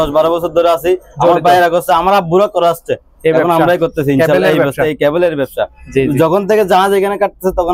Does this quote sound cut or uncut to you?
uncut